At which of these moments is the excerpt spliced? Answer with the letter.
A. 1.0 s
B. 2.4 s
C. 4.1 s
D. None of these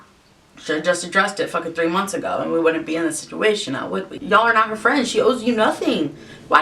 C